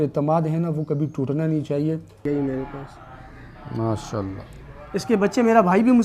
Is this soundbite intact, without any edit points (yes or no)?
no